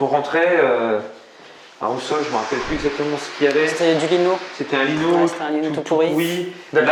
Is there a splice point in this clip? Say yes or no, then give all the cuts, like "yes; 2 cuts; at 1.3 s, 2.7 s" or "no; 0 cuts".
no; 0 cuts